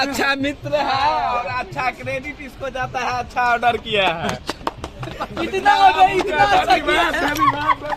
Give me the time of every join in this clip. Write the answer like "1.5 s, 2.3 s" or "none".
none

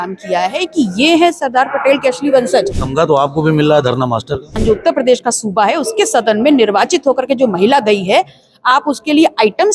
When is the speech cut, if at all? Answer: 2.8 s, 4.6 s

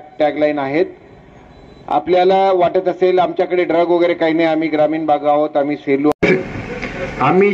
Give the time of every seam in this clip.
6.1 s

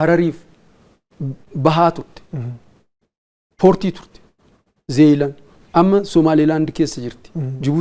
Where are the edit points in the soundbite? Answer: none

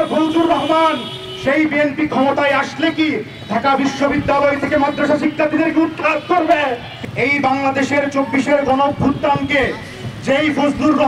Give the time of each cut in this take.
6.9 s

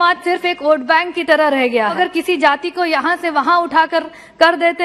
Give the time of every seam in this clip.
1.9 s

